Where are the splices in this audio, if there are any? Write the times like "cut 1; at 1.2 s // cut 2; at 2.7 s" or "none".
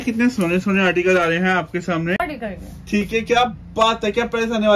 cut 1; at 2.2 s